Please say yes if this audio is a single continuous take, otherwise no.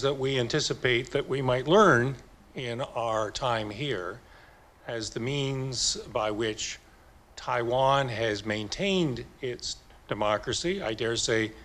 yes